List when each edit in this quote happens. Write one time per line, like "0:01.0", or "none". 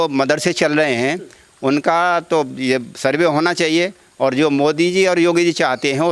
none